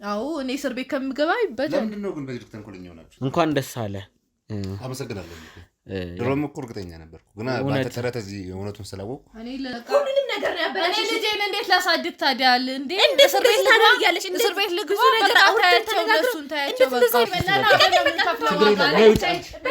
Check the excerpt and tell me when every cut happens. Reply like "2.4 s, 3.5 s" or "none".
3.0 s, 9.7 s, 17.3 s